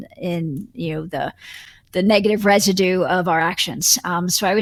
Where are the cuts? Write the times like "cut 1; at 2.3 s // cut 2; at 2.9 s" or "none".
none